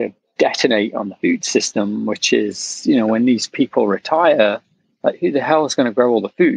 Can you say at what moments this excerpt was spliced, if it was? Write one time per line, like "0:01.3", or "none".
none